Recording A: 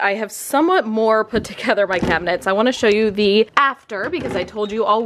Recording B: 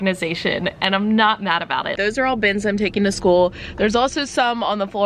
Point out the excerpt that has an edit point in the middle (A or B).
B